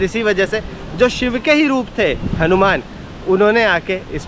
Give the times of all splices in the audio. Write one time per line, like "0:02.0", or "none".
none